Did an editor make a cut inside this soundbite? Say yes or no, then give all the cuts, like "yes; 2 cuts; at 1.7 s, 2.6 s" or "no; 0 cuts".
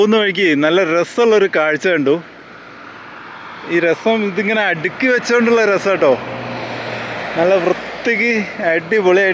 no; 0 cuts